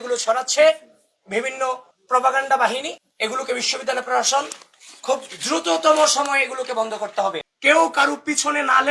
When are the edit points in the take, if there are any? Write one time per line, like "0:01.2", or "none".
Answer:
0:07.4